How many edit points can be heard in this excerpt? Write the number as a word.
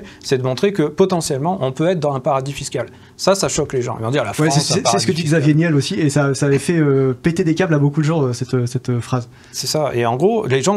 zero